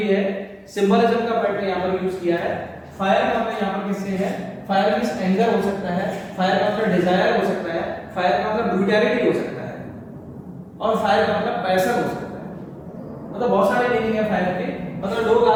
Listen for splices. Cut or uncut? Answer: uncut